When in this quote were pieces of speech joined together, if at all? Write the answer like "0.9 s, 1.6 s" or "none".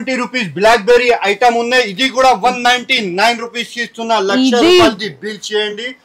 none

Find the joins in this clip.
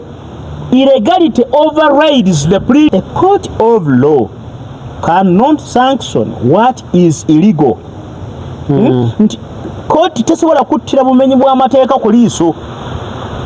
2.9 s

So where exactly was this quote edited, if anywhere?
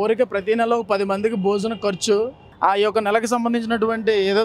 none

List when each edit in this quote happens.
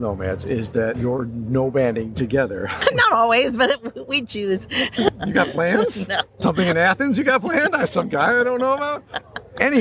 1.0 s, 2.7 s, 5.1 s, 6.3 s

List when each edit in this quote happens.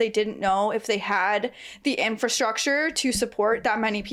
none

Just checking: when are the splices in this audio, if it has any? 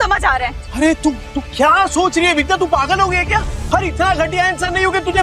3.6 s

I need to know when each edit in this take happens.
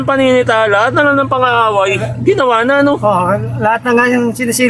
none

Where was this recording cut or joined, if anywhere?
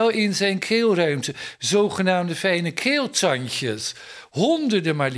none

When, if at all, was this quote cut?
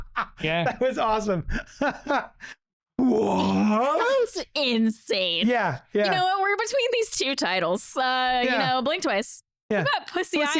none

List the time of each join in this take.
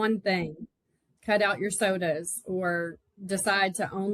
none

